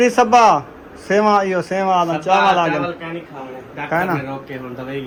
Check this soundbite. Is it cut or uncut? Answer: uncut